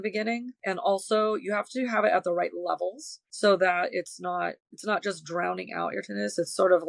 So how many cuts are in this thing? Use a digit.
0